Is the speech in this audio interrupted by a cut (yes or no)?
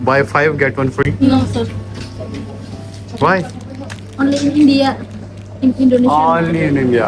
no